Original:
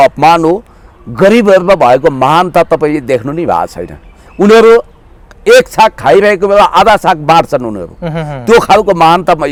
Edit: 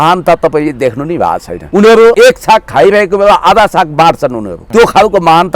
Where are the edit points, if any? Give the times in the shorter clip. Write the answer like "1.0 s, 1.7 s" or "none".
1.5 s, 2.1 s, 4.5 s